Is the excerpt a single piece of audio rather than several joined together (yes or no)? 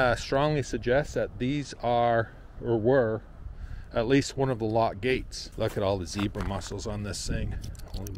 no